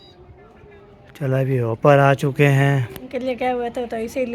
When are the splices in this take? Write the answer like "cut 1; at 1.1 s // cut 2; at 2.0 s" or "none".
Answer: cut 1; at 3.4 s